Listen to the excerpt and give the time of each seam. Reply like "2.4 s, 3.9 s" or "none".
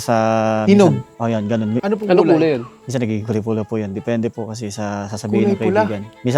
1.8 s